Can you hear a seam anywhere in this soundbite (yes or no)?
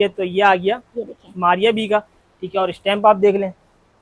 no